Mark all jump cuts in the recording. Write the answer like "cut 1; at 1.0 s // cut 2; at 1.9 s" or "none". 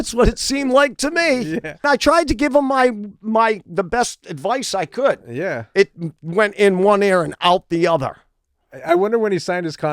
cut 1; at 1.9 s